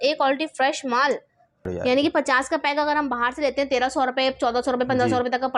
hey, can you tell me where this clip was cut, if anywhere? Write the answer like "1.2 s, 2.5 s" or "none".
1.6 s